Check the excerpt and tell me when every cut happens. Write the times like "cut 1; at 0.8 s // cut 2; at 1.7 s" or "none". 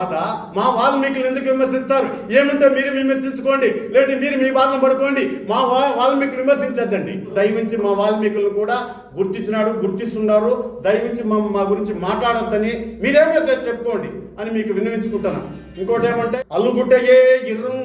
cut 1; at 7.3 s // cut 2; at 16.3 s